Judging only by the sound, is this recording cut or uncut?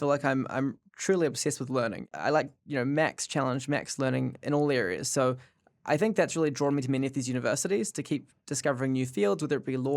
cut